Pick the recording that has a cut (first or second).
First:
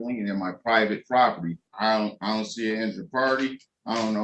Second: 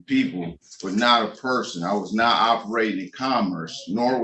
first